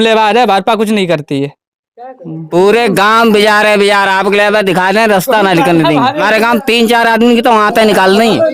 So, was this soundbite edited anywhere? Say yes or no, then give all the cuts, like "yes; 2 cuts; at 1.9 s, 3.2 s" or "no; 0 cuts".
yes; 2 cuts; at 1.9 s, 6.2 s